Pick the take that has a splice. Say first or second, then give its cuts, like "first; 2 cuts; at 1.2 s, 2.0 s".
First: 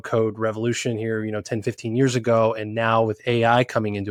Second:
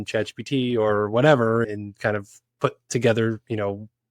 second; 1 cut; at 1.6 s